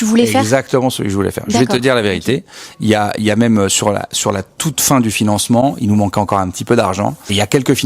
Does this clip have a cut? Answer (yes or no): no